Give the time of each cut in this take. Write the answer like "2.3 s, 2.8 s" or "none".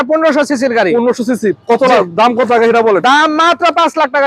none